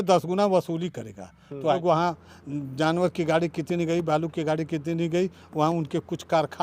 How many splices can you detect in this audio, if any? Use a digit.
1